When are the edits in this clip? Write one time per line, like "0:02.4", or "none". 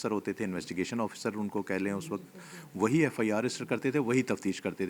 none